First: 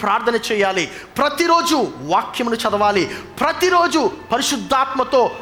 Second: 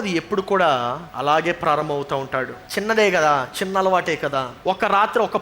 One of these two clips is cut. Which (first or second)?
second